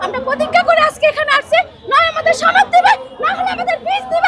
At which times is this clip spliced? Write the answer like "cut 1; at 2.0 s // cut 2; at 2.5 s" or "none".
none